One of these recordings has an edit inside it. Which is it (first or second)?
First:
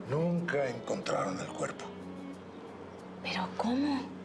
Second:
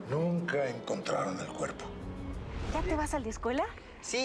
second